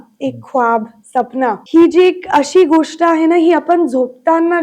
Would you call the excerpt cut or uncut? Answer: cut